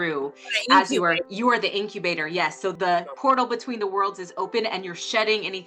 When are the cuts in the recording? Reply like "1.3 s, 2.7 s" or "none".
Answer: 1.3 s, 2.7 s